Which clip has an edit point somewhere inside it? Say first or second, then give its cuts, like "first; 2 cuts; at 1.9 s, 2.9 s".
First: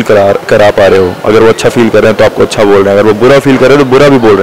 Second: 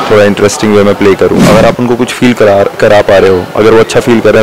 second; 1 cut; at 1.4 s